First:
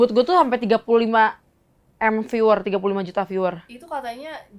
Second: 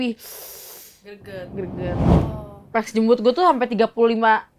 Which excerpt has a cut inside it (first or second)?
second